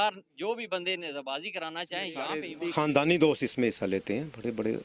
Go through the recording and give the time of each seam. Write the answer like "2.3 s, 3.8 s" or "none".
2.5 s